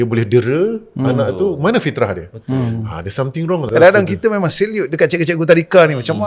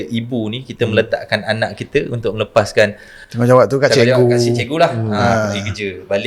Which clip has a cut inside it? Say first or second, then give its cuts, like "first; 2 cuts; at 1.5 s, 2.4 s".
first; 1 cut; at 3.7 s